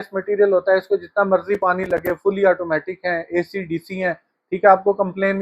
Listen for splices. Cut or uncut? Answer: uncut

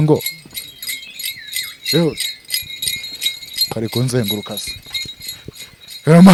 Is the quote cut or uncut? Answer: uncut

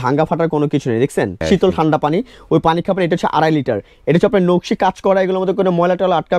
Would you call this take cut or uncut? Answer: cut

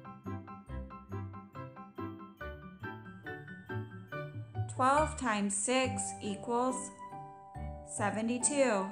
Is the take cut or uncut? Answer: cut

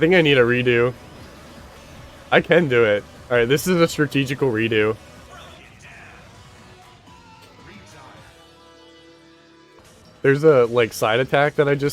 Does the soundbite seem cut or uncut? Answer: cut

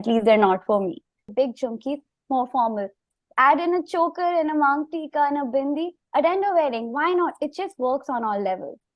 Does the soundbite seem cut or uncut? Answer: cut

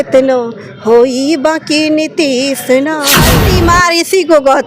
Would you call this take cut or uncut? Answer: cut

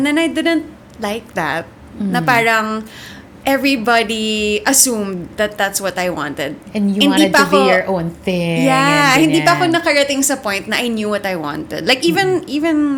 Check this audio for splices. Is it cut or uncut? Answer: uncut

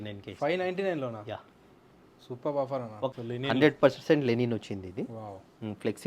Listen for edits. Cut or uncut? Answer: cut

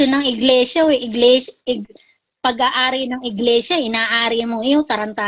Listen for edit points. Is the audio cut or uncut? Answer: uncut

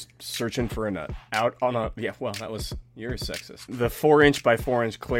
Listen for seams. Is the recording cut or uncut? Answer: cut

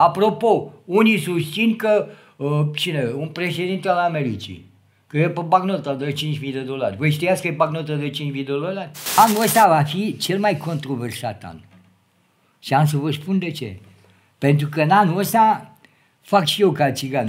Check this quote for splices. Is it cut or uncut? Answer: cut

